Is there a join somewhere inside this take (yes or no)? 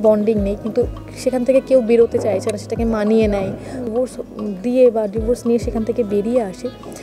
yes